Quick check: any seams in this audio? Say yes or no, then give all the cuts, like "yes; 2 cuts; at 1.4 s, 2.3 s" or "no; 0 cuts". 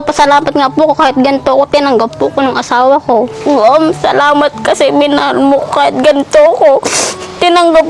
yes; 1 cut; at 3.3 s